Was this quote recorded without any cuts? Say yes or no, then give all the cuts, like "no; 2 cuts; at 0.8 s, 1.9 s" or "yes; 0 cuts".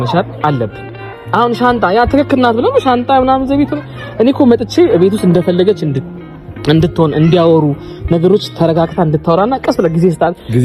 yes; 0 cuts